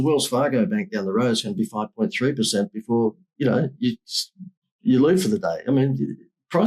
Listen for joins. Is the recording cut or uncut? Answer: uncut